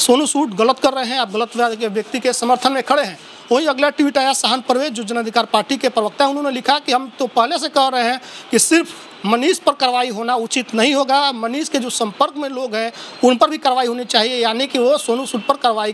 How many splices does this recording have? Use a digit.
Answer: 0